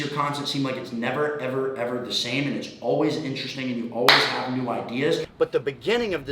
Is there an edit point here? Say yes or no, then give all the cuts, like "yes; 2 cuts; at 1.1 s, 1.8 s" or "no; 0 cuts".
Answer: yes; 1 cut; at 5.3 s